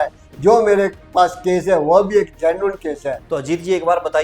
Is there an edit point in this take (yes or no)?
yes